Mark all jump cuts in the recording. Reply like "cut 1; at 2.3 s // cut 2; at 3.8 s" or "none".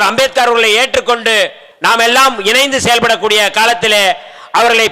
cut 1; at 1.7 s